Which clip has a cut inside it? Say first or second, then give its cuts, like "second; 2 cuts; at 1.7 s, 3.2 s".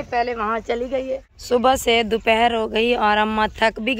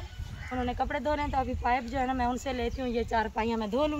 first; 1 cut; at 1.3 s